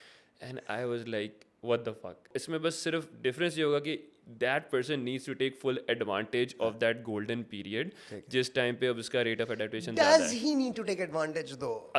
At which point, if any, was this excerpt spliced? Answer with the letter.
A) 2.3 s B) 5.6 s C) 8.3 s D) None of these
A